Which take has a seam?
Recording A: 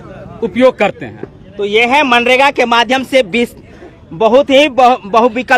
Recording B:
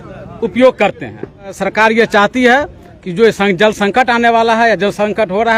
B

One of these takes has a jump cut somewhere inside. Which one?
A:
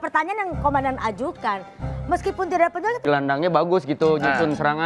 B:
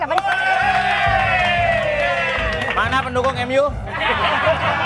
A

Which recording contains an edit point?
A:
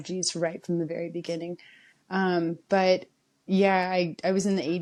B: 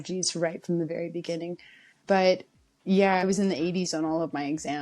B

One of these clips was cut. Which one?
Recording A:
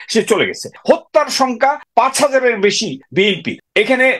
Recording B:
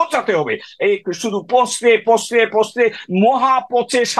A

